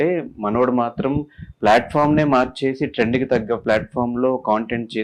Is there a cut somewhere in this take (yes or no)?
no